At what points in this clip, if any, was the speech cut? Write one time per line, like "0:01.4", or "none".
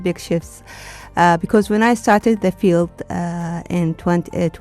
none